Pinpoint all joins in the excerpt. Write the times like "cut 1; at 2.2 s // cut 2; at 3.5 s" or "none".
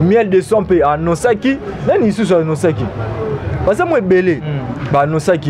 none